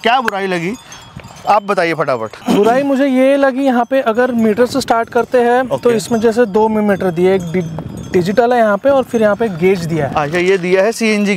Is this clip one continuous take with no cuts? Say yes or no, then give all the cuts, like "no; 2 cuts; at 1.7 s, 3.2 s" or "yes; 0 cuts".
yes; 0 cuts